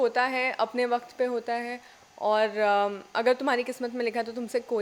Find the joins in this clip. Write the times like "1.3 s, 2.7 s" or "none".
none